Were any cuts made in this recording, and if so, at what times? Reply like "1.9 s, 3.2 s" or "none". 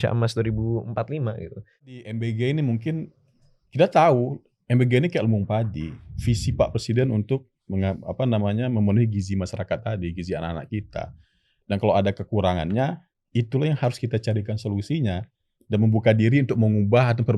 1.9 s